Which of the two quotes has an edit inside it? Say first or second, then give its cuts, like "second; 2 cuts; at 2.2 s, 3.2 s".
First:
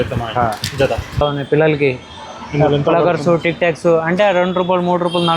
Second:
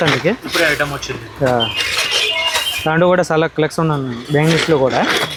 first; 1 cut; at 1.2 s